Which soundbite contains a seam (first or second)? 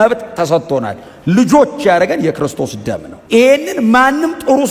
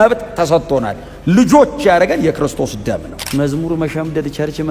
second